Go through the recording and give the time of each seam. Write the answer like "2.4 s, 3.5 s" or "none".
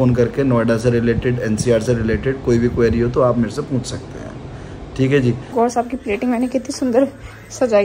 5.4 s